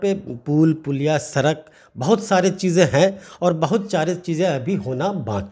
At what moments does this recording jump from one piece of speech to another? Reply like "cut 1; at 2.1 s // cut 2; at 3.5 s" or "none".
none